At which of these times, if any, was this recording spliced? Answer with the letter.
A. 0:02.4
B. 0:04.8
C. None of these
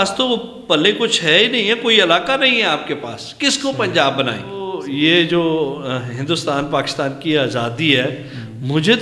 B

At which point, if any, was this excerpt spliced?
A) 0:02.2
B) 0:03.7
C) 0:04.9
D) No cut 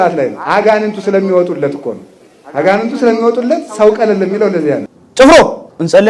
C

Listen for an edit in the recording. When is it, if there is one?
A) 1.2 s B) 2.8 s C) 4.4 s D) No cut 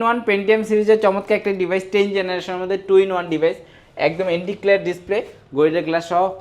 D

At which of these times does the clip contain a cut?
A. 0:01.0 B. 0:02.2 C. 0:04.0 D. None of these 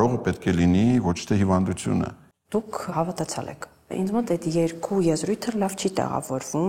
B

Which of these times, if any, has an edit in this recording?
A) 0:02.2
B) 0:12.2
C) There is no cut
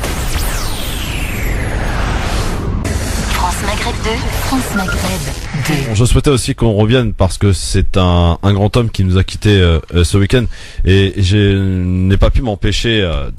C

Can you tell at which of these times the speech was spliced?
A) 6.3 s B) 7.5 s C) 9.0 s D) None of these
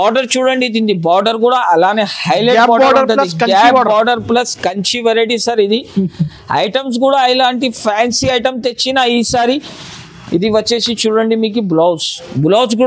D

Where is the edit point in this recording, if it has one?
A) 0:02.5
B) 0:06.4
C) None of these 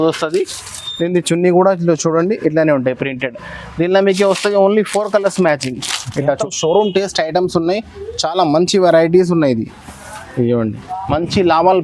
B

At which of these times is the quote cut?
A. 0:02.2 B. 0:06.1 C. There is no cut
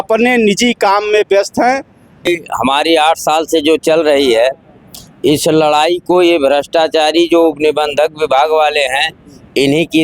A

